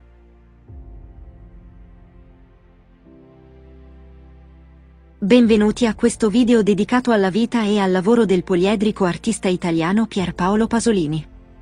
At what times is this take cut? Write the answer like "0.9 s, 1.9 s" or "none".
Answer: 5.2 s